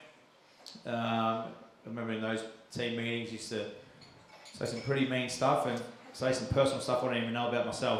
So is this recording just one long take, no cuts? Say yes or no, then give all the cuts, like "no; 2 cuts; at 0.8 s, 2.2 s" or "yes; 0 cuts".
yes; 0 cuts